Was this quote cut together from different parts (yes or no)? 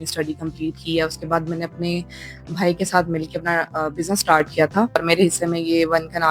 yes